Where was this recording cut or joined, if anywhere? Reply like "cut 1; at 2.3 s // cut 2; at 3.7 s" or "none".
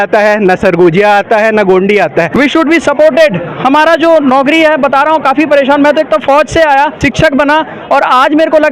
cut 1; at 2.3 s // cut 2; at 6.9 s